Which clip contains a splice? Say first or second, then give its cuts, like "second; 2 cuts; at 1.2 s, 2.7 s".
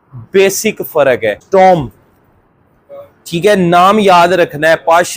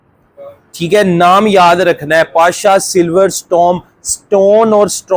first; 1 cut; at 1.4 s